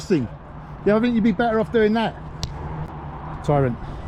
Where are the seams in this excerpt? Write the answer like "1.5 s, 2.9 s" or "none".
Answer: 2.9 s